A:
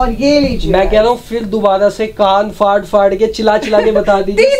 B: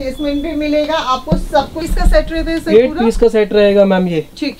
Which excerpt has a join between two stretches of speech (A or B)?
B